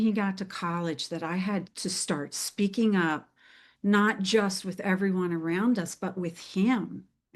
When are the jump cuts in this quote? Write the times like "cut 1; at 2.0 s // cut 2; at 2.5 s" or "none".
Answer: none